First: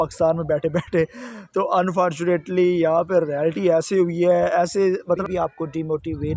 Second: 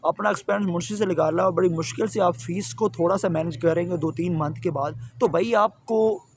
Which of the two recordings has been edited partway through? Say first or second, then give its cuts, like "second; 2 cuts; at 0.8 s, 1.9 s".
first; 1 cut; at 5.2 s